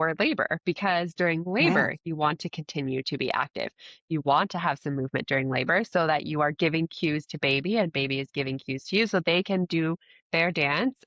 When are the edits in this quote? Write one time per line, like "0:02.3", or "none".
none